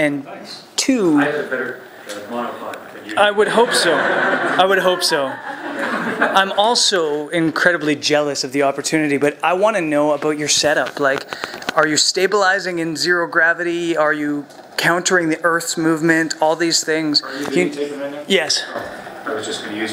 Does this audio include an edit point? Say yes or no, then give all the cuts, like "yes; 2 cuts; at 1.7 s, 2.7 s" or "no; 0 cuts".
yes; 1 cut; at 9.0 s